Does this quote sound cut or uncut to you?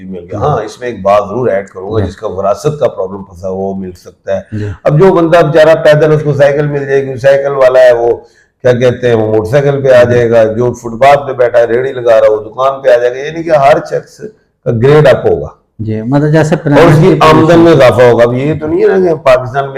uncut